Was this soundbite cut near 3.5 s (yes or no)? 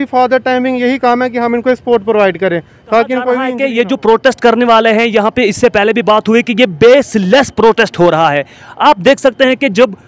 yes